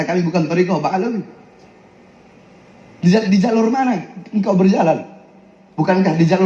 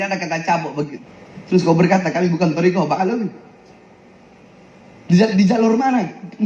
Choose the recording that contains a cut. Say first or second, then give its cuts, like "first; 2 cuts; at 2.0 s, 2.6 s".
second; 1 cut; at 1.0 s